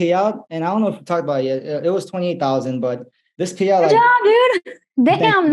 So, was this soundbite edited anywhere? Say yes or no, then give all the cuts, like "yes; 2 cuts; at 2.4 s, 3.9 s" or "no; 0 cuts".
no; 0 cuts